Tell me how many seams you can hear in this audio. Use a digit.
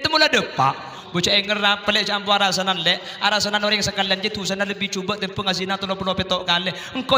1